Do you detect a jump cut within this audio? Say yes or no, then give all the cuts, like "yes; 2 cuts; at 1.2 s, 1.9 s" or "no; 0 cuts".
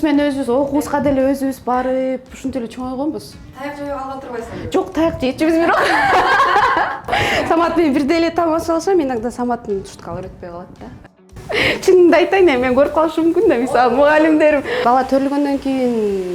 yes; 3 cuts; at 7.2 s, 11.4 s, 14.8 s